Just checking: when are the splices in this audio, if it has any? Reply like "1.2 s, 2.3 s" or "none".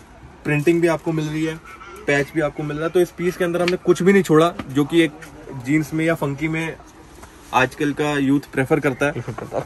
none